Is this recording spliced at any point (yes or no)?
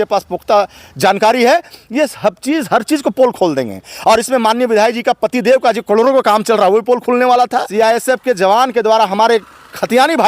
yes